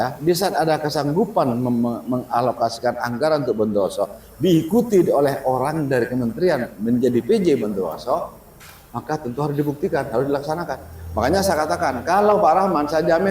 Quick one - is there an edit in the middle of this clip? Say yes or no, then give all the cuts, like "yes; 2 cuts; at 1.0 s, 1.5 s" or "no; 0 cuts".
no; 0 cuts